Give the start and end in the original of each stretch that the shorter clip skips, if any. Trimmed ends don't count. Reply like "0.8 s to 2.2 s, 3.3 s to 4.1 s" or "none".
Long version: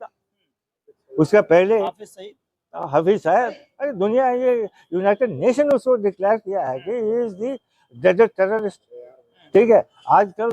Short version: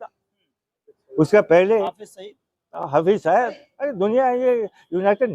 none